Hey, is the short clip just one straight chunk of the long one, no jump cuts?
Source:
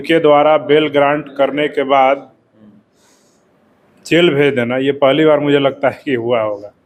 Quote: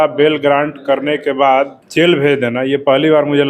no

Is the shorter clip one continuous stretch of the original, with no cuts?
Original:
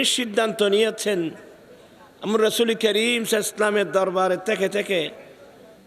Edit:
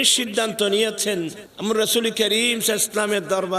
no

